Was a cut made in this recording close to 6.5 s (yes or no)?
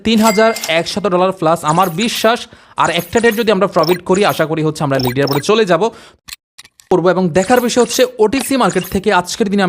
yes